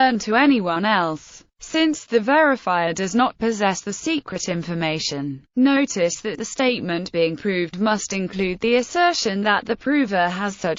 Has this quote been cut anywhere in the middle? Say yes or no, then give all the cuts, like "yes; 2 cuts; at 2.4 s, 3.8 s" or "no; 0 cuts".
yes; 1 cut; at 3.2 s